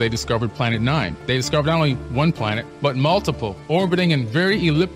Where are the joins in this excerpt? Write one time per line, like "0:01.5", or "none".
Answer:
none